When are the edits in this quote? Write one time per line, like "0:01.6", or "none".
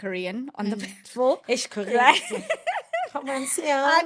none